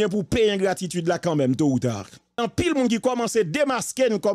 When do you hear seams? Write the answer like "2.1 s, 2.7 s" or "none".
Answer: 2.4 s